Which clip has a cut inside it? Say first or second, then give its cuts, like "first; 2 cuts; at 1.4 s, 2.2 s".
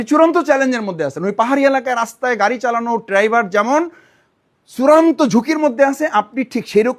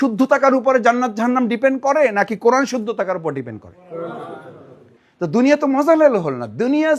second; 1 cut; at 4.9 s